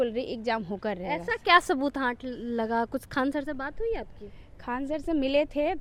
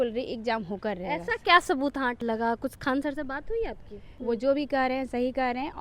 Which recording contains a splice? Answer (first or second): second